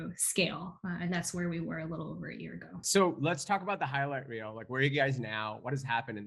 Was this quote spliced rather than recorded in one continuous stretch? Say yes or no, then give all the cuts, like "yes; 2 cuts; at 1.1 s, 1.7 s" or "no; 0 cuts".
yes; 1 cut; at 2.8 s